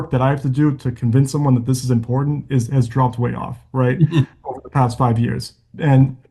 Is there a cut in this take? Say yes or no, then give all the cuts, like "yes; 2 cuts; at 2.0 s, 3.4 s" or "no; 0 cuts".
no; 0 cuts